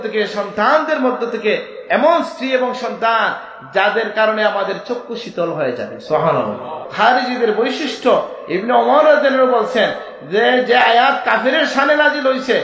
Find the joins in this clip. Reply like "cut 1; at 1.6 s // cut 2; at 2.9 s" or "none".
cut 1; at 6.8 s